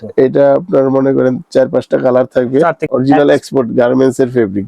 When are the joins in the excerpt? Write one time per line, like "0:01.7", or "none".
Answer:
0:02.8

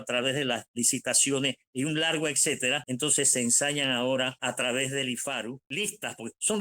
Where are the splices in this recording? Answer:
0:02.8
0:04.4
0:05.7

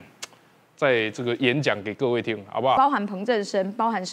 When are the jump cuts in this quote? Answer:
0:02.8

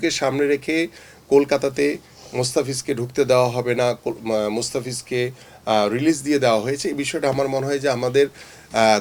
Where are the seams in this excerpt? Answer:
none

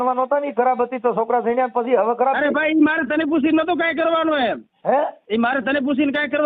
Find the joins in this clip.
0:05.2

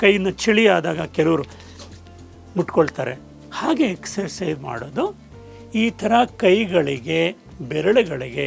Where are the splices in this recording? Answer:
none

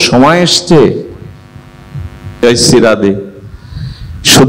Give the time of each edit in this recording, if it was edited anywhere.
0:02.4

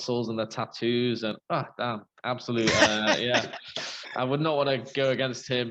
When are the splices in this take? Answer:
none

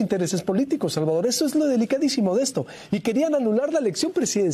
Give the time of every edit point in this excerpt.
none

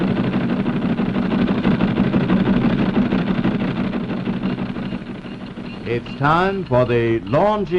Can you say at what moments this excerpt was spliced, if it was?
none

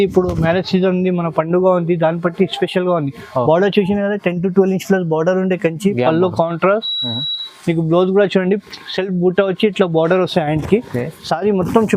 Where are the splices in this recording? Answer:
none

